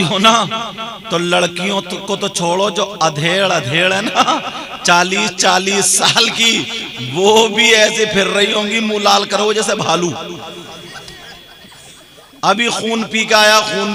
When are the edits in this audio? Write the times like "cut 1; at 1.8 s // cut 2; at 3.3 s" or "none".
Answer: none